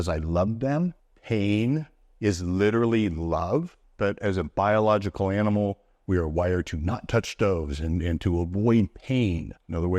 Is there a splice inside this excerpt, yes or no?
yes